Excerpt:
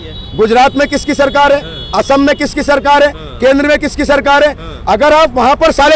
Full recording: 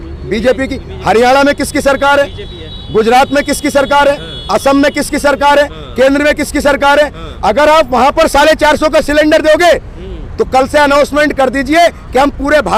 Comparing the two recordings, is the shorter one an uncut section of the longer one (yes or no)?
yes